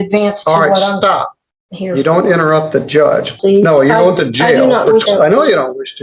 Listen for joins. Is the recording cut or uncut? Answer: cut